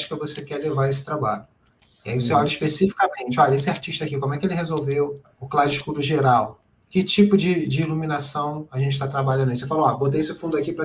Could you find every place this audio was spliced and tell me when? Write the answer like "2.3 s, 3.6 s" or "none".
5.3 s